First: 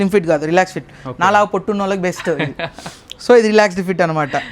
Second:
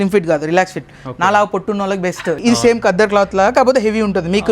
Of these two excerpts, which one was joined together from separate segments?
second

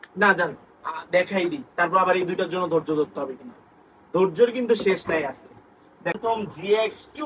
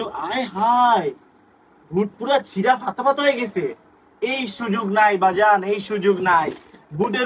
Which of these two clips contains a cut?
first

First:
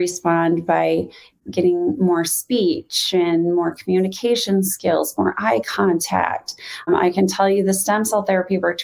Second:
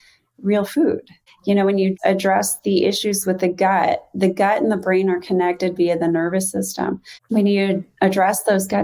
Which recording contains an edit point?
second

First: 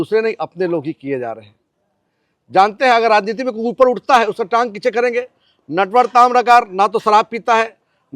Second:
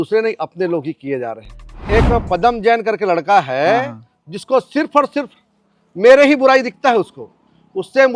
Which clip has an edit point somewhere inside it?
second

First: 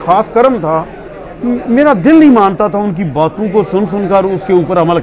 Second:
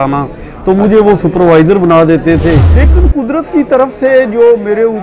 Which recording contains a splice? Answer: second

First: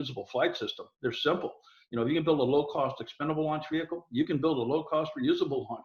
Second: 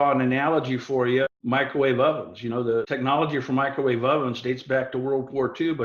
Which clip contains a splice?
second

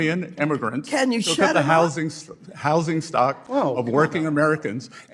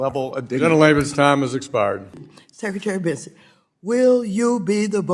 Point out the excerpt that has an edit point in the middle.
second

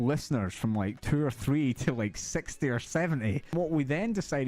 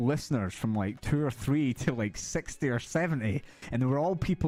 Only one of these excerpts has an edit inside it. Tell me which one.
first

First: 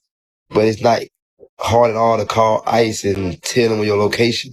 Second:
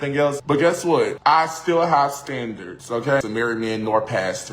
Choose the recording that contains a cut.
second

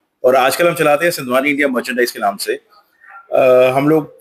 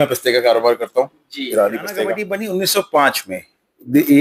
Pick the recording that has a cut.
second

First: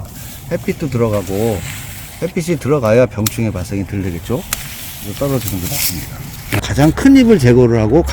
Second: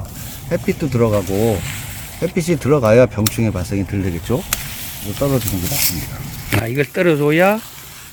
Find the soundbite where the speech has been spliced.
first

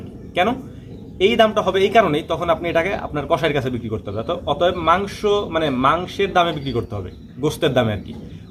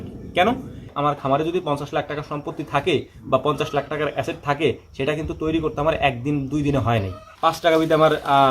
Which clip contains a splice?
second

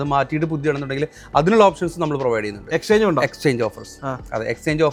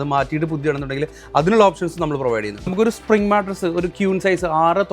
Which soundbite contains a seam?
second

